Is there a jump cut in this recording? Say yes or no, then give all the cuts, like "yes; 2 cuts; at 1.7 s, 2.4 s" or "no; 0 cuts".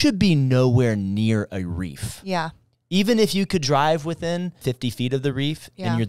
yes; 1 cut; at 4.6 s